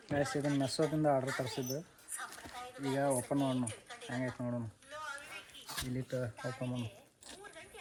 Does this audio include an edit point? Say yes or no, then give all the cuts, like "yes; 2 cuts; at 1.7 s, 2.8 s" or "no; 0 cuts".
no; 0 cuts